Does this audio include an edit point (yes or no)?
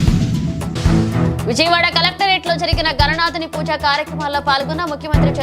yes